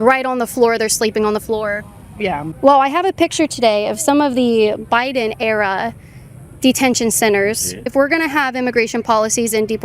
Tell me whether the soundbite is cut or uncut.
cut